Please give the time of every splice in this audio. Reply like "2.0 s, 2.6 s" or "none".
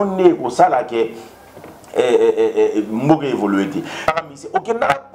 4.1 s